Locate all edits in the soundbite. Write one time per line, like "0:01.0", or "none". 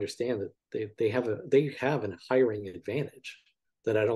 none

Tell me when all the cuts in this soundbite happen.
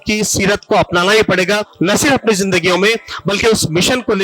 0:01.7

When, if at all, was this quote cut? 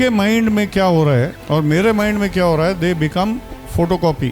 0:01.4

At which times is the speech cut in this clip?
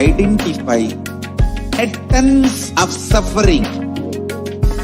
0:01.8
0:03.6

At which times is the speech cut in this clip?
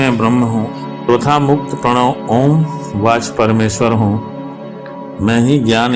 0:01.1

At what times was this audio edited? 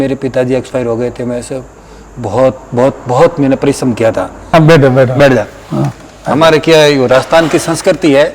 0:04.4

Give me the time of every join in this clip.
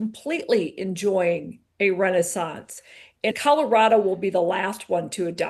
0:03.3

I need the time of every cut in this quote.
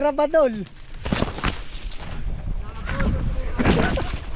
0:02.1

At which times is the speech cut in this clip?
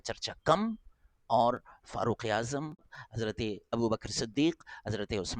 0:02.9

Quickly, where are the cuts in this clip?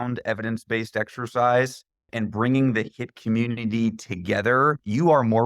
0:02.1

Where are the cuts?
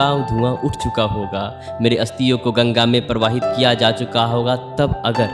none

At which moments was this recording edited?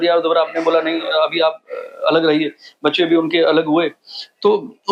none

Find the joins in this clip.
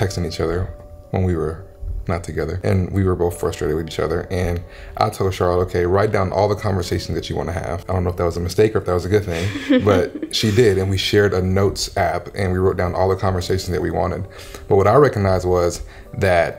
0:02.6
0:07.8

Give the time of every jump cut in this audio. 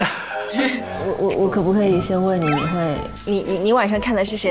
0:01.0

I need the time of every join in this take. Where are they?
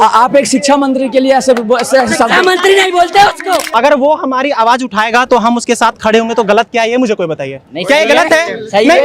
0:03.7

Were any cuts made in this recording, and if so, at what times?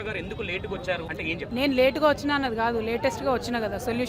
0:01.2

